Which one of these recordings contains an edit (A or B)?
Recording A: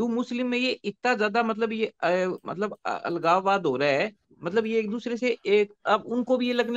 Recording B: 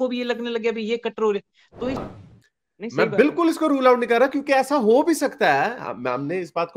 B